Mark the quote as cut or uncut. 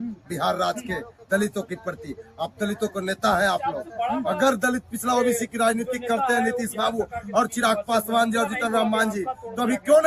uncut